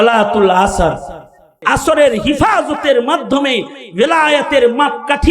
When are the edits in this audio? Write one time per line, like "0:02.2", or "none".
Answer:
0:01.5